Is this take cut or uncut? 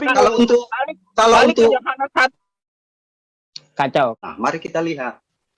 cut